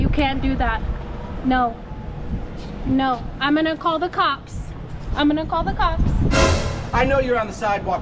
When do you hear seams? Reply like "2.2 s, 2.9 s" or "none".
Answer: 6.9 s

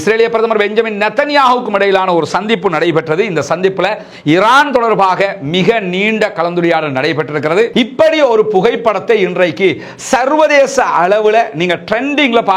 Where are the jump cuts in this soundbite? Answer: 7.7 s

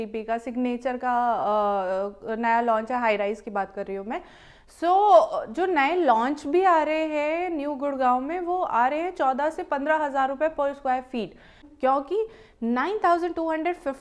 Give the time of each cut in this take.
11.6 s

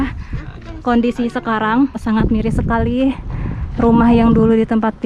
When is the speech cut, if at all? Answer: 2.0 s

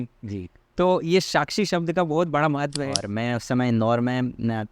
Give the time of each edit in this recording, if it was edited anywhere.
3.1 s

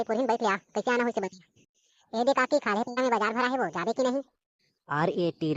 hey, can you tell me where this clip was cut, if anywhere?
none

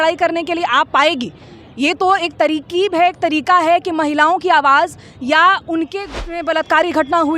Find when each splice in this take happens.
6.2 s

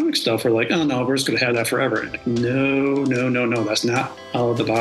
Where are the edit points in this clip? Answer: none

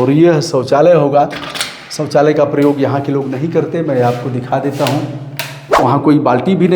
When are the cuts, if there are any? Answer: 5.8 s

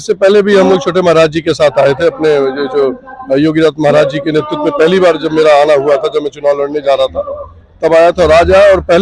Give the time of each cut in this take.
none

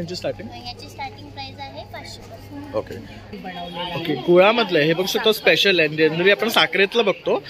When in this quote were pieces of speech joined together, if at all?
3.2 s

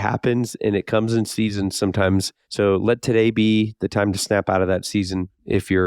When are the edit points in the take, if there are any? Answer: 2.4 s

